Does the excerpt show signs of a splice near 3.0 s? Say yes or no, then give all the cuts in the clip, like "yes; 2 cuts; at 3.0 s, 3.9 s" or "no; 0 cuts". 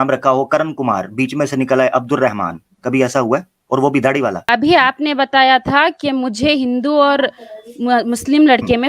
no; 1 cut; at 4.4 s